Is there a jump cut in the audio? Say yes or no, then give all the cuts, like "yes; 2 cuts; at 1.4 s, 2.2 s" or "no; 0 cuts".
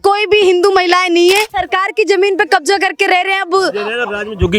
yes; 1 cut; at 1.5 s